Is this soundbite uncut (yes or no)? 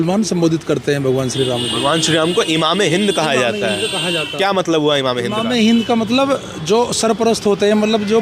yes